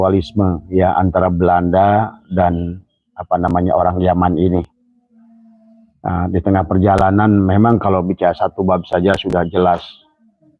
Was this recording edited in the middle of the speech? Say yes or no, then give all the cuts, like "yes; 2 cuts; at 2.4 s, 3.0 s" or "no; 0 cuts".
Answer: no; 0 cuts